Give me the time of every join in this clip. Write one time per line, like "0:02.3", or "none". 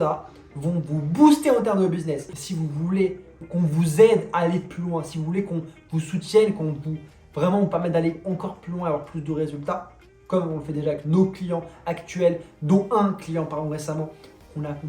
0:02.4
0:03.4